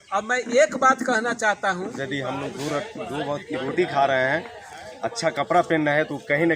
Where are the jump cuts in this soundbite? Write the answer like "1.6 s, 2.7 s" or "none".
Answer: 2.0 s